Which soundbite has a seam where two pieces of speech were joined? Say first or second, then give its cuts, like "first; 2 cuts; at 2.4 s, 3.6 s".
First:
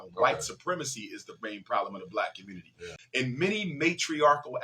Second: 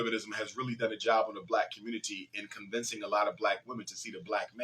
first; 1 cut; at 3.0 s